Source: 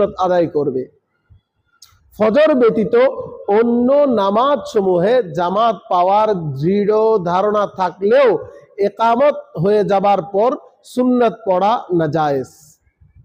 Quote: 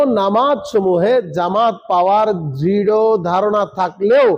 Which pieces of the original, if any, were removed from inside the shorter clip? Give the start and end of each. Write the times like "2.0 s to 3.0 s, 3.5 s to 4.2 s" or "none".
none